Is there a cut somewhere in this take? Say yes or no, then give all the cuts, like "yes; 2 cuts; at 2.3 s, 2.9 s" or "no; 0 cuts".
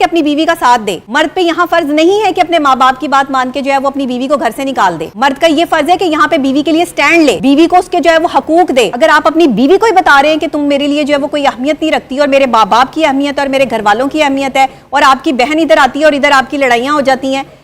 yes; 4 cuts; at 1.0 s, 5.1 s, 7.4 s, 8.9 s